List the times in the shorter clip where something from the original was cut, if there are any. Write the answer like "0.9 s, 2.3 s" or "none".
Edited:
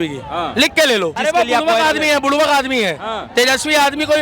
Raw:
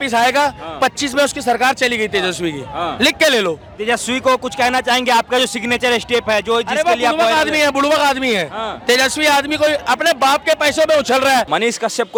1.2 s